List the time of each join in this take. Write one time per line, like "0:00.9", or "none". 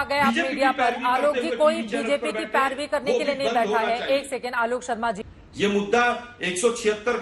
0:05.3